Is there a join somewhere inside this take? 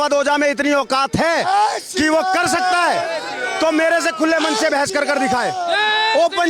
no; 0 cuts

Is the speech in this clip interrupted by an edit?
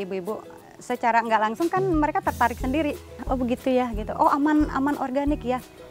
yes; 1 cut; at 3.2 s

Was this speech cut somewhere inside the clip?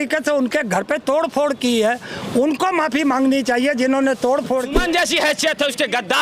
yes; 1 cut; at 4.8 s

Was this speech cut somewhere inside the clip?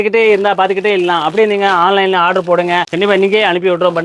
no; 0 cuts

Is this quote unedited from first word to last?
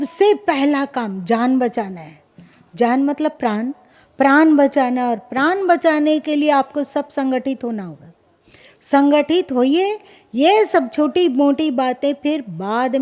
yes; 0 cuts

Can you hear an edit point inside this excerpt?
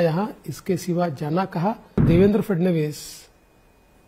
yes; 1 cut; at 2.0 s

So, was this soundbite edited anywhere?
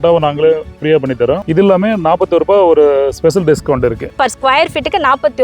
yes; 1 cut; at 4.2 s

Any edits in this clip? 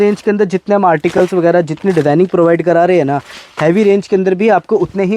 no; 0 cuts

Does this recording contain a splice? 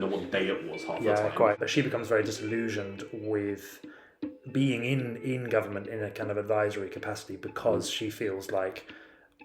yes; 1 cut; at 1.6 s

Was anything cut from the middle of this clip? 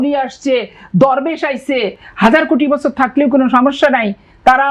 no; 0 cuts

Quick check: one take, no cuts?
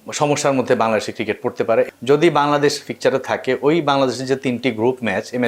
no; 1 cut; at 1.9 s

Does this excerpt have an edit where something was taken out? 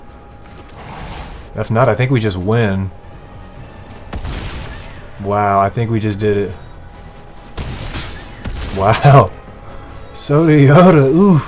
yes; 3 cuts; at 1.5 s, 3.0 s, 6.9 s

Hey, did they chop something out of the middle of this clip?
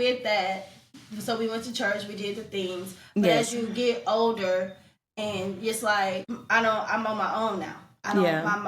yes; 1 cut; at 6.3 s

